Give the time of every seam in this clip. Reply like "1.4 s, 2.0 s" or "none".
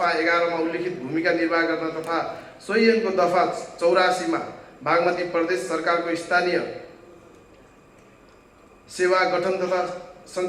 none